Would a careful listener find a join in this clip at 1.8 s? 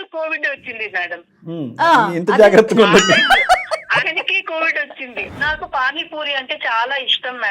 no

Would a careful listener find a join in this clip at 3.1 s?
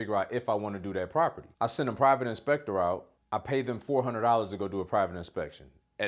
yes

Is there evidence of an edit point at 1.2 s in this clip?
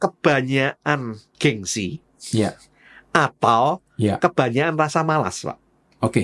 yes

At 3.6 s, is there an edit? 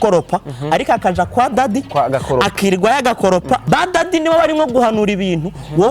yes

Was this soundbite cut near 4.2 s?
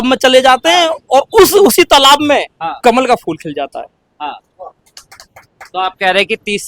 no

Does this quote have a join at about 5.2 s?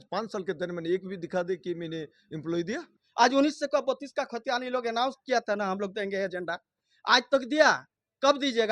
no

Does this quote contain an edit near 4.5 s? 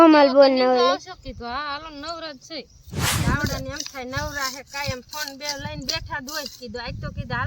no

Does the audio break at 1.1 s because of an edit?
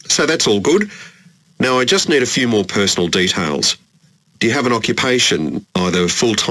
no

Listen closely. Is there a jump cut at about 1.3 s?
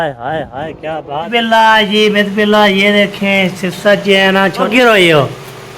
yes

